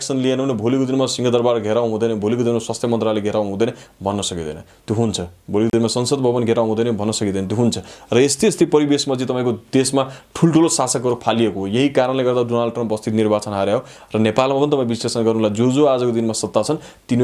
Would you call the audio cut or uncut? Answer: uncut